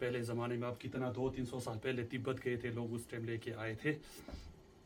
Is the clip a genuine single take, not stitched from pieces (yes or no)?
yes